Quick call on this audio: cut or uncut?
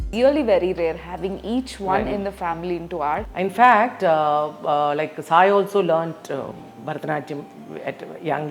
cut